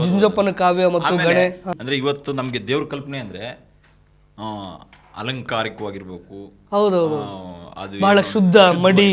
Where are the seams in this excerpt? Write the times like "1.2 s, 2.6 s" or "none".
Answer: 1.7 s